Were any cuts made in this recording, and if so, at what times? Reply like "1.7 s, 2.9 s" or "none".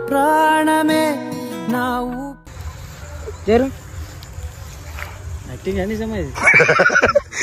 none